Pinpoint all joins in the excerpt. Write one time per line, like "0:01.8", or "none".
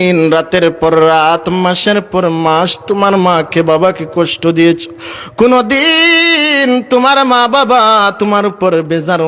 none